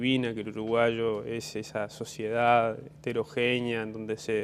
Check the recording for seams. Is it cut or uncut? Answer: cut